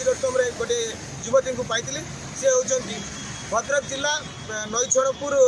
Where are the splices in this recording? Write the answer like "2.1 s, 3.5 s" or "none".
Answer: none